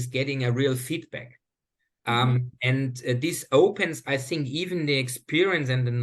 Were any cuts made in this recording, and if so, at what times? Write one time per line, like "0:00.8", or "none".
none